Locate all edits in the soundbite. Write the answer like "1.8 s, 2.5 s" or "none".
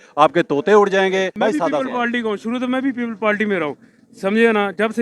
1.3 s